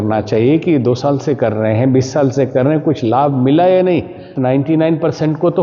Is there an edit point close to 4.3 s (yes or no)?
yes